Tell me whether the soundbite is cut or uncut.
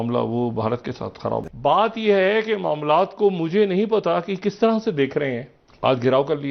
cut